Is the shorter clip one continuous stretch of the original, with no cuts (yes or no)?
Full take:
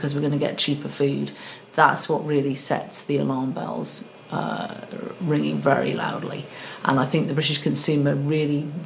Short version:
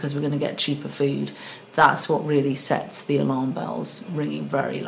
no